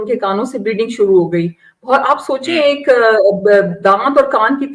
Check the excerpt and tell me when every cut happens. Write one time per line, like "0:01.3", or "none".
none